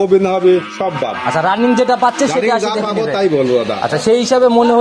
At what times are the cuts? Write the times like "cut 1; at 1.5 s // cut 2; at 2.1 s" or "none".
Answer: none